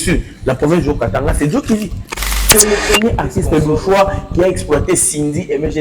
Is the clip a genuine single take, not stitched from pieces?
no; 1 cut; at 2.3 s

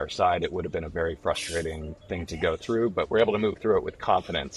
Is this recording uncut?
yes; 0 cuts

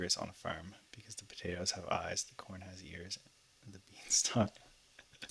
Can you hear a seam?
no; 0 cuts

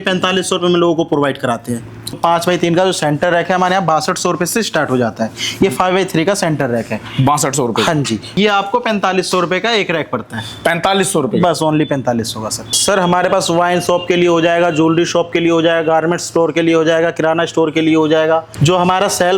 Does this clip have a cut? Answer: yes; 4 cuts; at 2.2 s, 8.3 s, 12.7 s, 18.5 s

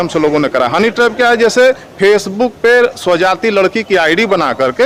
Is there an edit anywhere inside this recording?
no; 0 cuts

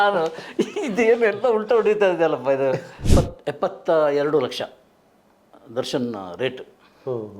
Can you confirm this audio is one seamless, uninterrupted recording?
no; 1 cut; at 2.9 s

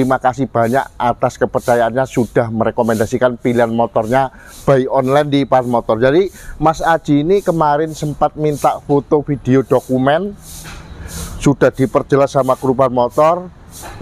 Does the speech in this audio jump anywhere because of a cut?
no; 0 cuts

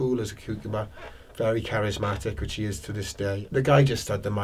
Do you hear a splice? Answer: yes; 1 cut; at 3.4 s

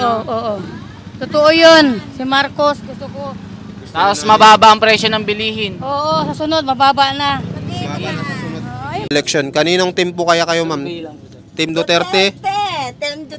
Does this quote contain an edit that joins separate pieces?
yes; 1 cut; at 9.1 s

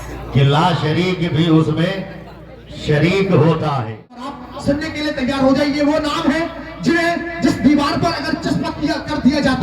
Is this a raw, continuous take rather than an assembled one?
no; 1 cut; at 4.4 s

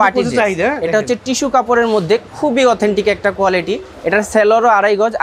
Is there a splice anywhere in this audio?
no; 0 cuts

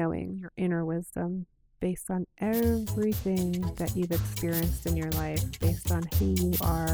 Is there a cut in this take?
no; 0 cuts

